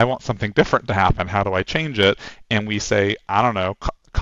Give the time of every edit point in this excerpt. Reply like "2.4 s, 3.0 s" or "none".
none